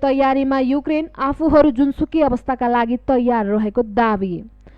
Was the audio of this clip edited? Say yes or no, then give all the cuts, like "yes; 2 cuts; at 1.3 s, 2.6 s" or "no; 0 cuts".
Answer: no; 0 cuts